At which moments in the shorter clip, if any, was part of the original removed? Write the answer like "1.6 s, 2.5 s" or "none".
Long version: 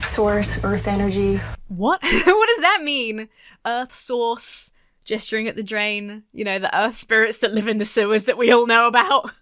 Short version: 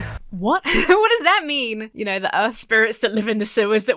1.9 s